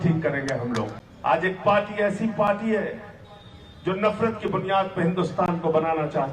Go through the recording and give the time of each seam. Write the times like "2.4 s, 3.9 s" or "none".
1.0 s